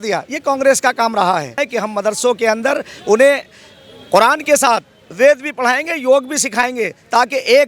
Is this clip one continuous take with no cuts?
no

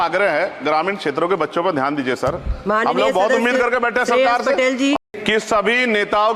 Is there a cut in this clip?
yes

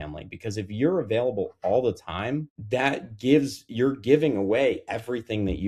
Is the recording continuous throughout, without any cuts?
no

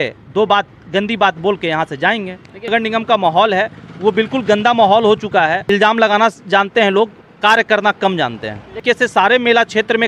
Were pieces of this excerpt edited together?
yes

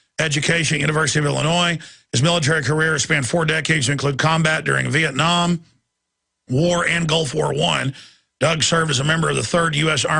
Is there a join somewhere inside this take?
yes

